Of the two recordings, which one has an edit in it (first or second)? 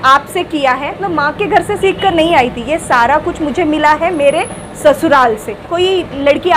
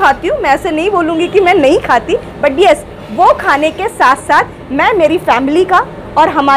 first